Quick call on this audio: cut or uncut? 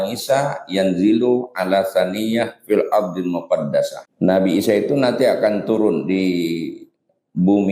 cut